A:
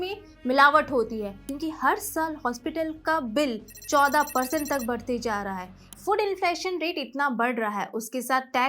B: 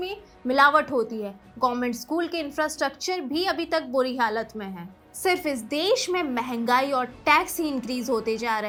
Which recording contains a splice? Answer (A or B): A